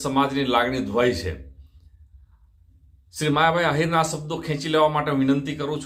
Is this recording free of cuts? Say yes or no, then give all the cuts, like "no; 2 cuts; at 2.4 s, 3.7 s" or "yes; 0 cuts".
yes; 0 cuts